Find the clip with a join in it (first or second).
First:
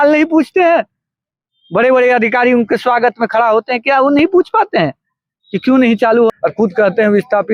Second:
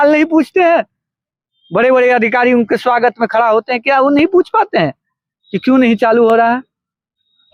first